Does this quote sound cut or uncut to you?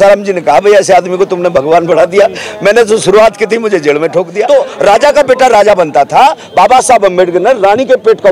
cut